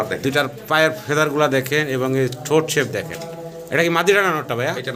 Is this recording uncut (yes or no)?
yes